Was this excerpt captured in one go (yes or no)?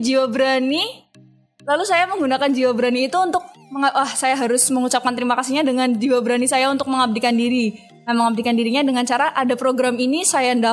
yes